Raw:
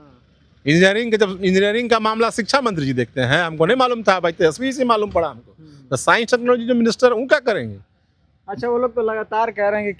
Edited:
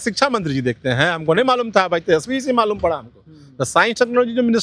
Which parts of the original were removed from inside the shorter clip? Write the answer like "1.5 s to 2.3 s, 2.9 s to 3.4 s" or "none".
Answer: none

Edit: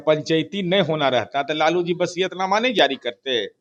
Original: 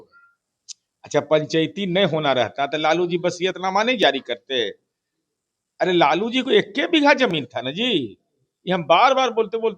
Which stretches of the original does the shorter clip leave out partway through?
none

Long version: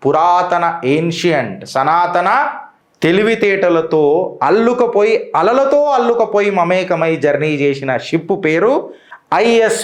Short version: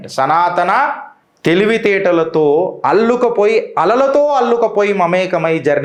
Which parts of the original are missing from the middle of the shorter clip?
none

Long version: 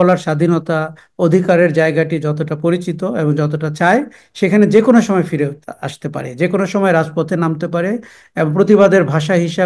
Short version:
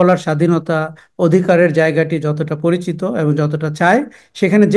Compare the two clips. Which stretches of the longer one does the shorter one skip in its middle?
none

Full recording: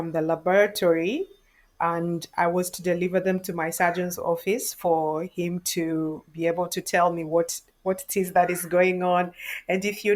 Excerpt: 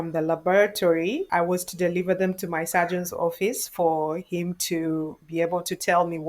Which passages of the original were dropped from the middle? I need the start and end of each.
1.3 s to 2.3 s

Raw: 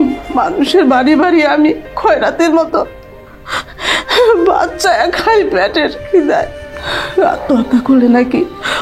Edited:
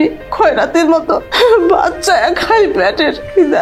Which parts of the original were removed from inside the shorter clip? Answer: 2.9 s to 4.0 s

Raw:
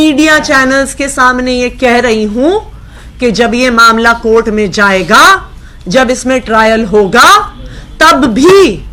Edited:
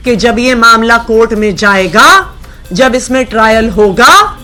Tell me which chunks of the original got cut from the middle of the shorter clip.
none

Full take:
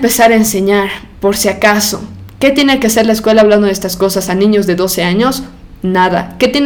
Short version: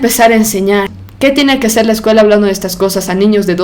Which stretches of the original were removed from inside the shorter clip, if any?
1.0 s to 2.2 s

